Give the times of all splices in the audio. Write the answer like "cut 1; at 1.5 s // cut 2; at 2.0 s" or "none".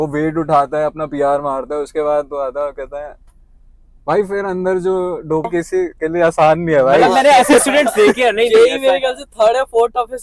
cut 1; at 5.5 s